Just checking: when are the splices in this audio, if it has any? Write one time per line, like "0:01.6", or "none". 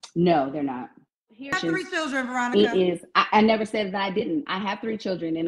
0:01.6